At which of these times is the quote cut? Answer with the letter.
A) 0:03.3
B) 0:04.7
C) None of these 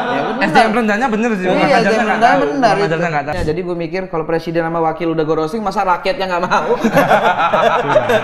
A